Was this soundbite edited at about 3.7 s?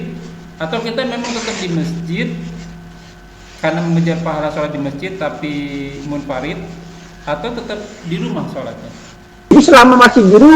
no; 1 cut; at 9.5 s

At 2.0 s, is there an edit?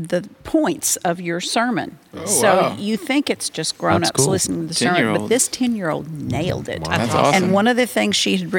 no; 0 cuts

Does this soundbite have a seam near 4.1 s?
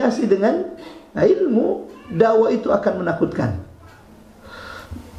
yes; 1 cut; at 4.1 s

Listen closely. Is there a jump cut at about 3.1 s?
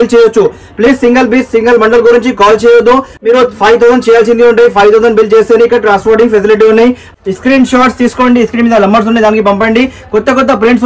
yes; 2 cuts; at 3.1 s, 7.1 s

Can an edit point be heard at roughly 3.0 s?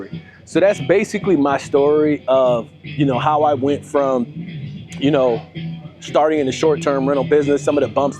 no; 0 cuts

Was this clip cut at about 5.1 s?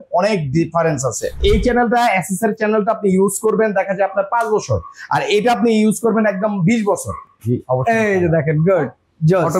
no; 2 cuts; at 1.4 s, 7.2 s

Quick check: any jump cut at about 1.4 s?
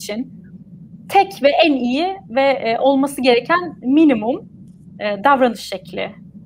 no; 0 cuts

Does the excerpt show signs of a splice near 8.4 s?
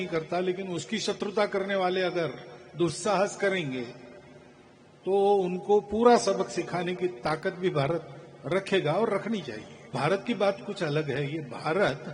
no; 1 cut; at 9.9 s

